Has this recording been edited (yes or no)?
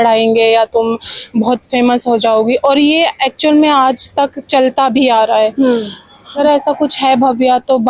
yes